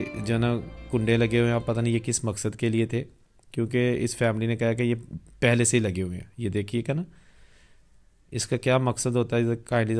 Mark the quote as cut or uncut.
uncut